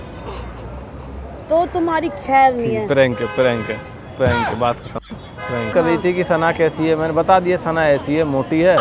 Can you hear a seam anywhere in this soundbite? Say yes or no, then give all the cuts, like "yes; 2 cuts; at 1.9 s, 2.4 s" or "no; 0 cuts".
yes; 1 cut; at 5.7 s